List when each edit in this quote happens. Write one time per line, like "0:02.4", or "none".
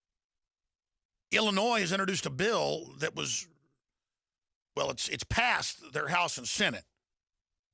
0:04.6